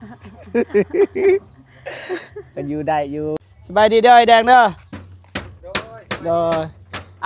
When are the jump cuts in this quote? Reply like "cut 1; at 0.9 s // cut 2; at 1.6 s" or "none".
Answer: cut 1; at 3.4 s